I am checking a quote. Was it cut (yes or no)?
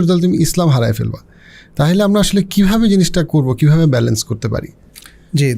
no